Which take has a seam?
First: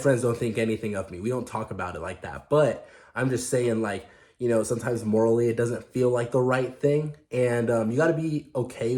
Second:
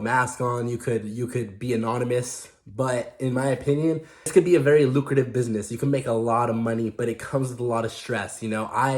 second; 1 cut; at 4.3 s

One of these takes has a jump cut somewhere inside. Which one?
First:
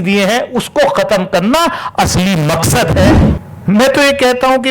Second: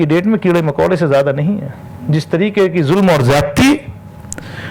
first; 1 cut; at 3.3 s

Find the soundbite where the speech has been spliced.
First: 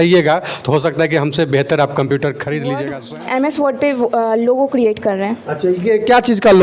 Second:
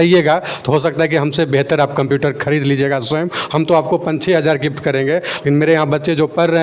first; 1 cut; at 3.0 s

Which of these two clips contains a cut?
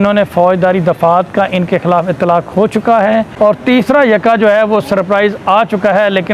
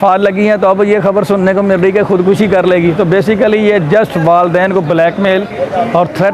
first; 1 cut; at 3.3 s

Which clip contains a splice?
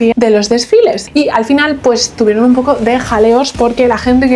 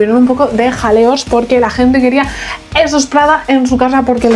first; 1 cut; at 1.0 s

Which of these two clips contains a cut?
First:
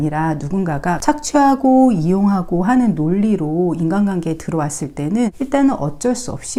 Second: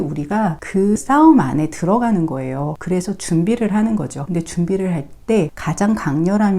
second; 4 cuts; at 1.0 s, 2.8 s, 4.2 s, 5.6 s

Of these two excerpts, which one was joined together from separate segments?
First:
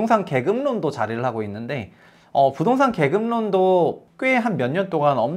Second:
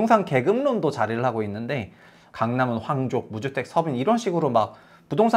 second; 1 cut; at 2.1 s

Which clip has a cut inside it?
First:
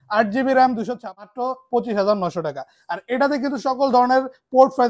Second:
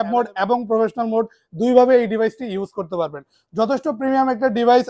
first; 1 cut; at 1.0 s

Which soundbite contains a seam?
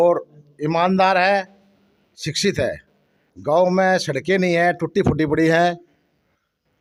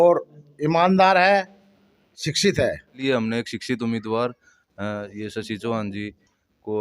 second; 1 cut; at 3.0 s

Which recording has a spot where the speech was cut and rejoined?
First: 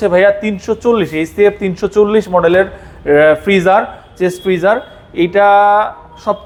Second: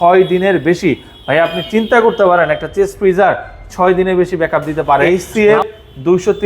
second; 1 cut; at 5.0 s

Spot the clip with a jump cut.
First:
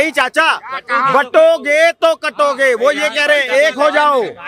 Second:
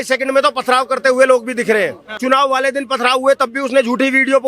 second; 1 cut; at 2.1 s

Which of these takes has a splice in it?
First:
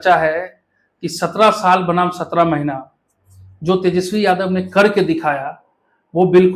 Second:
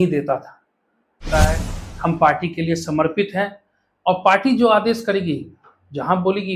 second; 1 cut; at 1.3 s

